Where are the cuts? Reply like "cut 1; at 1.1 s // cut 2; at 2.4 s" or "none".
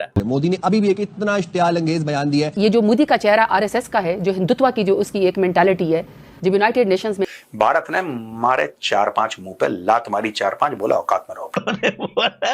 cut 1; at 2.5 s // cut 2; at 7.2 s // cut 3; at 11.6 s